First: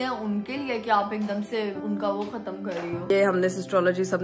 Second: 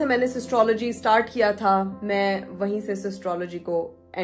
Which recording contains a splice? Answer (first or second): first